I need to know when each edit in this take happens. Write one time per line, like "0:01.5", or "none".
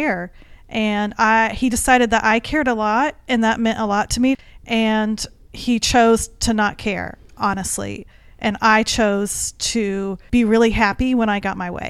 0:04.3
0:10.2